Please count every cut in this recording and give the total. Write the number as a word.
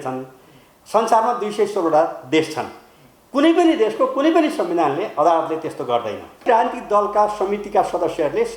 one